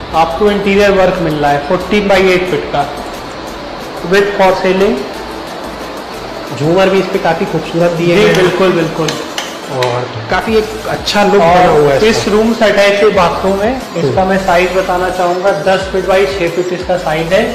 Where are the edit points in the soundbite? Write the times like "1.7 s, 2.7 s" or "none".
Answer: none